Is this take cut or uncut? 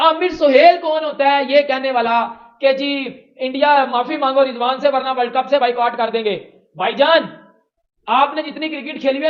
uncut